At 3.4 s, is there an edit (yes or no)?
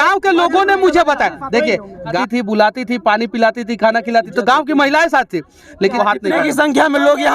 no